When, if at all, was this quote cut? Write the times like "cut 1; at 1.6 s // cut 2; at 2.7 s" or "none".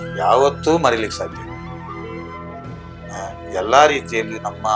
none